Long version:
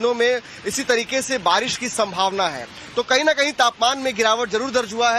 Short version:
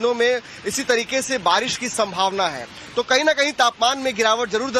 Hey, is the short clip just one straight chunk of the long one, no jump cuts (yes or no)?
yes